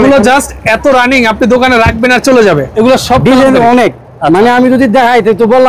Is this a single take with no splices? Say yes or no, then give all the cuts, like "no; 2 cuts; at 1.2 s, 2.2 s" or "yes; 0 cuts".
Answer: no; 1 cut; at 2.7 s